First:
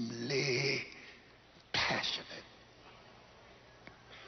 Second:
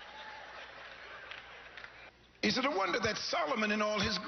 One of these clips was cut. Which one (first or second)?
second